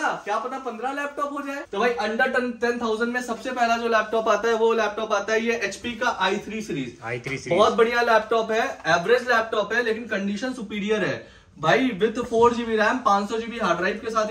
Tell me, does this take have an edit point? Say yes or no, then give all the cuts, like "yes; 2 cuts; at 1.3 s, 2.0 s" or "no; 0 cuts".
yes; 1 cut; at 1.6 s